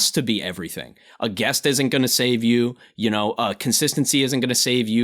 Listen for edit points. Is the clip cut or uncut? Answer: uncut